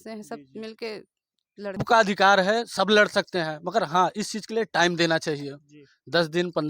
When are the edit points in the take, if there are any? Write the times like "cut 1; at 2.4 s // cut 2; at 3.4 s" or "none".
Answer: cut 1; at 1.8 s